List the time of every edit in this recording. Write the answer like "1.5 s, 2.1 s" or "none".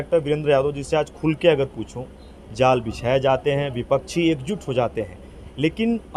none

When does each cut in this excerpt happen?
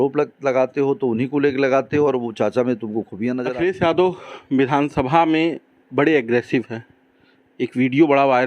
3.4 s

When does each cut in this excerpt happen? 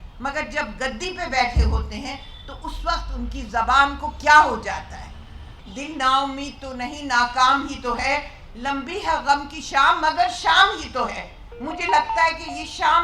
5.6 s

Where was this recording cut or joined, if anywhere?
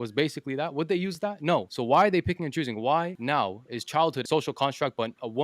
1.7 s, 3.2 s, 4.2 s

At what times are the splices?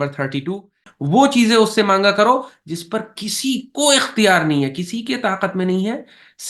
0.9 s

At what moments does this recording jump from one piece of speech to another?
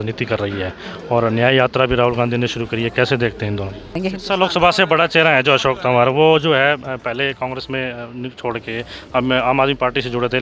4.1 s

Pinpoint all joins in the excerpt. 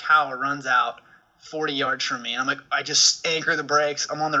none

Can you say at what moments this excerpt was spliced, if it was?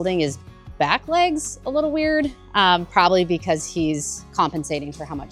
none

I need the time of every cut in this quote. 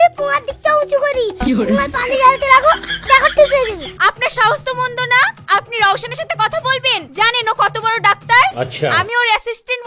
2.9 s, 3.8 s

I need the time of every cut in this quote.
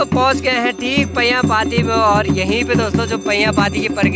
none

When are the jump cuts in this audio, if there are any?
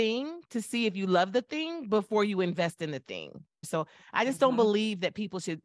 3.7 s

